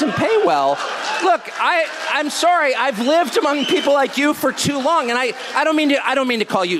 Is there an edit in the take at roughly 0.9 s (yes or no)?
no